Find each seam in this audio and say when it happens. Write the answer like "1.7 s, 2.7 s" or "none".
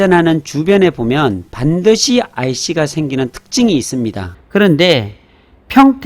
4.3 s